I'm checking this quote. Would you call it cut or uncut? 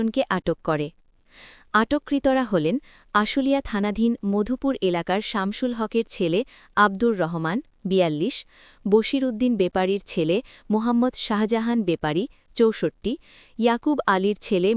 uncut